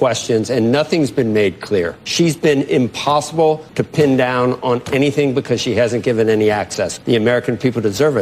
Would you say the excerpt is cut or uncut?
cut